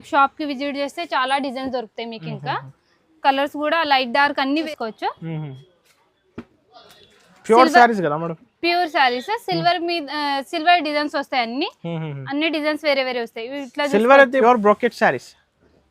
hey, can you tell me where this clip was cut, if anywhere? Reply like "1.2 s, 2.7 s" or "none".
4.7 s, 14.4 s